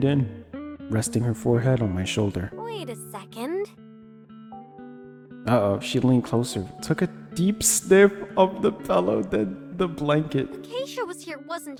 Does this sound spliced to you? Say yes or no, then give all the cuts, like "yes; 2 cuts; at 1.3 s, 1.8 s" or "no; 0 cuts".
no; 0 cuts